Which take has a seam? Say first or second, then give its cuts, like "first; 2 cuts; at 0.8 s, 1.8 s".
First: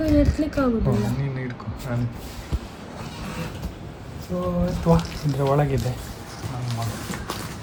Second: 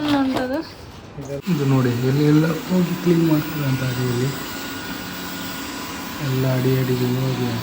second; 1 cut; at 1.4 s